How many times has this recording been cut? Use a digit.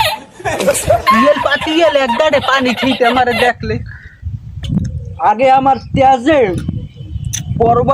1